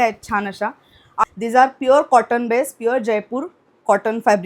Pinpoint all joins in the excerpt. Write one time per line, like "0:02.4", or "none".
0:01.2